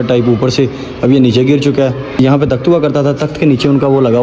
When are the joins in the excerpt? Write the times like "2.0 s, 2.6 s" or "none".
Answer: 2.1 s